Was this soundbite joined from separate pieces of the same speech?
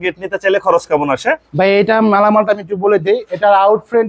no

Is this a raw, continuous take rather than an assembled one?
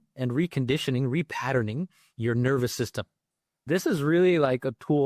no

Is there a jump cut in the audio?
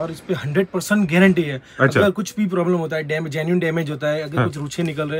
no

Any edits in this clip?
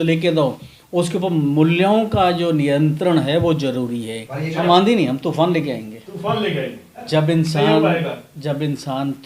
yes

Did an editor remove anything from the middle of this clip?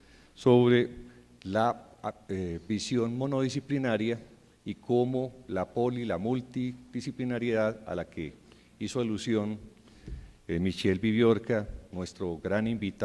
no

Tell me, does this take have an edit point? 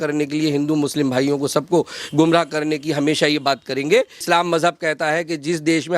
yes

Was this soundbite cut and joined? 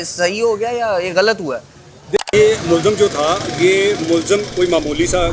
yes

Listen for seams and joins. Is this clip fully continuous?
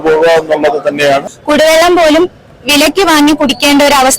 no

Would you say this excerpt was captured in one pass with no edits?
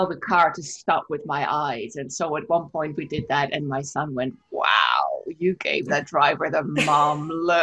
yes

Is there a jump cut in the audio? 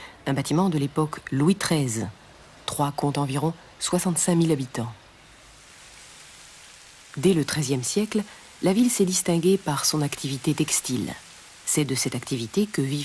no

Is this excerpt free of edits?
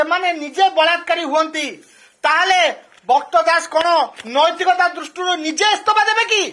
yes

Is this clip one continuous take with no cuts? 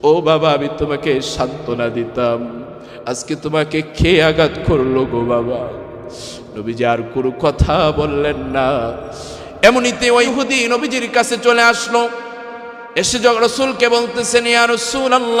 no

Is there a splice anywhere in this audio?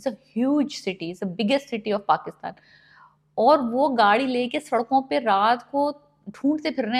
no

